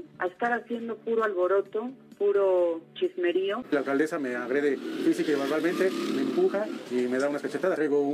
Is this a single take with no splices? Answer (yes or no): no